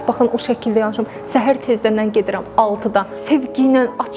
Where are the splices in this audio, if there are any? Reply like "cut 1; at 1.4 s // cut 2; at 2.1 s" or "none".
cut 1; at 3.1 s